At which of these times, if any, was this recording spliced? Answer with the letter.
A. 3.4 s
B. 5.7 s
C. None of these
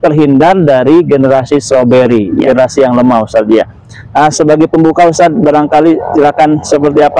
C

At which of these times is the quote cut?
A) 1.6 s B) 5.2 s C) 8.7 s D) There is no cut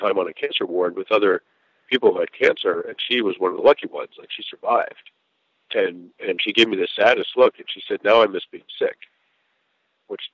D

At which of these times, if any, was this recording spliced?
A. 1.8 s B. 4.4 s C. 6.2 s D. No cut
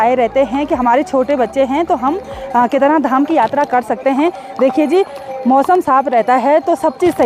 D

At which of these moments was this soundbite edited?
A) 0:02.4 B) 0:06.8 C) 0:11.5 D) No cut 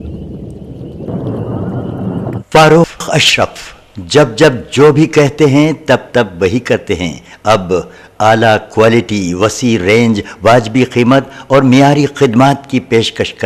A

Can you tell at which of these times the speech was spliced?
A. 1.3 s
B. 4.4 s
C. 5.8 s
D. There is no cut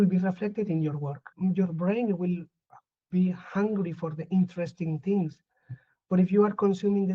A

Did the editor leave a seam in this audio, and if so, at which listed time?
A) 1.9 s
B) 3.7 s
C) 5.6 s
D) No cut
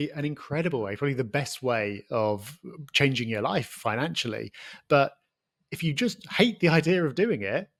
D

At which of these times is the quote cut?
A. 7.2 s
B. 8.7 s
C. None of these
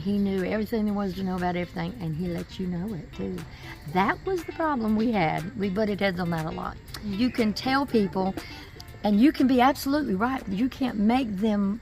A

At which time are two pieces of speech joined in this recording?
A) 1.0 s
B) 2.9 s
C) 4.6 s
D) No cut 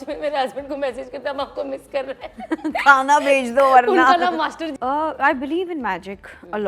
C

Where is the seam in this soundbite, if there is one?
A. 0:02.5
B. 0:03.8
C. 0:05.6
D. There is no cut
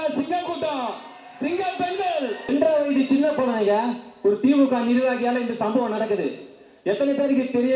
A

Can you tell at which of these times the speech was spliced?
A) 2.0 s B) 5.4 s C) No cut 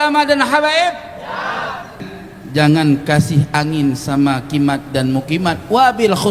A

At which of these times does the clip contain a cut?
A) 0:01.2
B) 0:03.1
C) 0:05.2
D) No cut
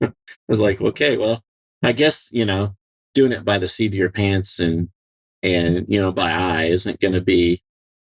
D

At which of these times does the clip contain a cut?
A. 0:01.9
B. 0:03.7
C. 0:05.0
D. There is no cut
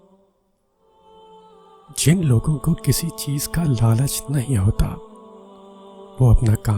A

